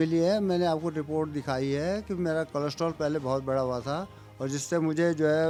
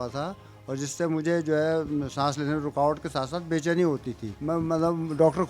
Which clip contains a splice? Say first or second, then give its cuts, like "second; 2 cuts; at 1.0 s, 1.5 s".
second; 1 cut; at 4.3 s